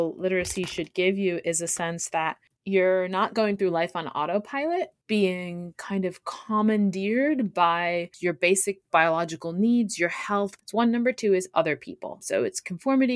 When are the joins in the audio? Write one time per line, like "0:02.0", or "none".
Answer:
0:02.5
0:05.0
0:08.1
0:10.6
0:12.2